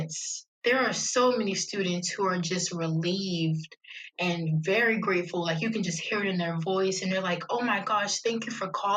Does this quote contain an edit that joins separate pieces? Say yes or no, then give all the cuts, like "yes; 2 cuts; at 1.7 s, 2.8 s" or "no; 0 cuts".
no; 0 cuts